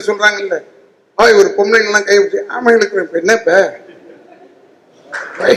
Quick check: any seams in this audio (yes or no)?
no